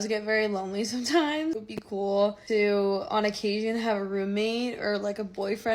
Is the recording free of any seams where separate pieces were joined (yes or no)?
yes